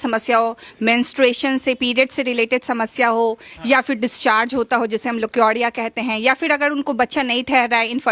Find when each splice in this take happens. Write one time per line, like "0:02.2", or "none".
none